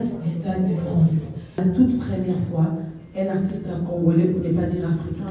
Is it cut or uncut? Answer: cut